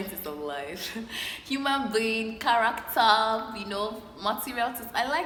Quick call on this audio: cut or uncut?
uncut